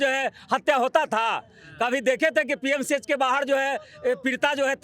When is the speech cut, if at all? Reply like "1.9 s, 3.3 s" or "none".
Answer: none